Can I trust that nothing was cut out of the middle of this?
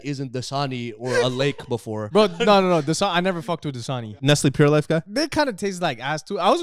no; 2 cuts; at 4.1 s, 5.1 s

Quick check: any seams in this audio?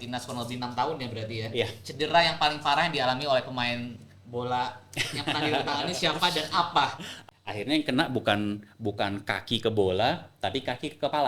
yes; 1 cut; at 7.1 s

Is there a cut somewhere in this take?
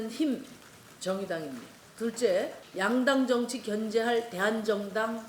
yes; 2 cuts; at 1.8 s, 2.6 s

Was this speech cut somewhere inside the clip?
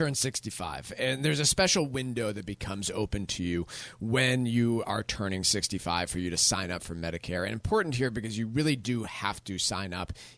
no; 0 cuts

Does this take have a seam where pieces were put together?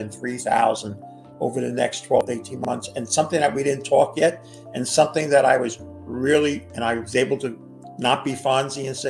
no; 0 cuts

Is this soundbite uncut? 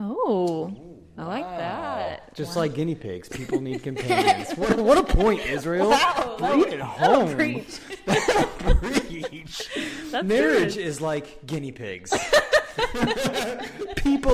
yes; 0 cuts

